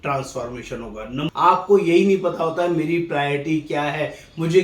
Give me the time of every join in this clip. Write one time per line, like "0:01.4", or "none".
0:01.3